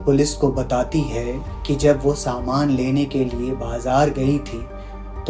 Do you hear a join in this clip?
no; 0 cuts

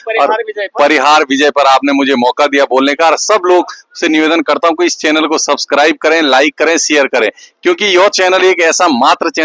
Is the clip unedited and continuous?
yes; 0 cuts

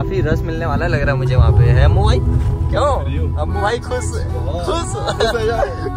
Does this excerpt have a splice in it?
no; 0 cuts

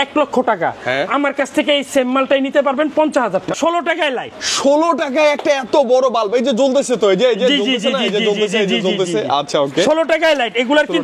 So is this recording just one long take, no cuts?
no; 1 cut; at 3.5 s

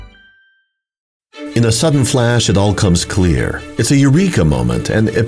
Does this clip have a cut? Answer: yes; 1 cut; at 1.2 s

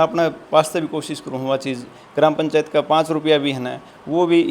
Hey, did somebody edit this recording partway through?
yes; 1 cut; at 1.9 s

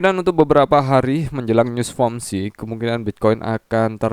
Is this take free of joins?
yes; 0 cuts

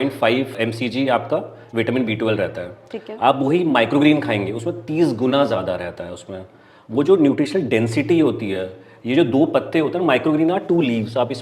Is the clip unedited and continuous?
yes; 0 cuts

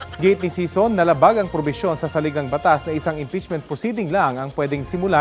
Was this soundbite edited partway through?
yes; 1 cut; at 4.2 s

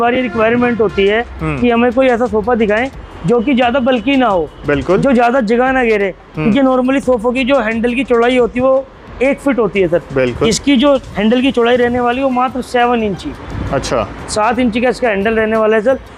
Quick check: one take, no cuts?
yes; 0 cuts

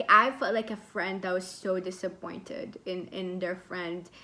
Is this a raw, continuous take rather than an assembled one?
yes; 0 cuts

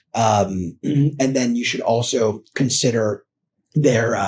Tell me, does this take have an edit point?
no; 0 cuts

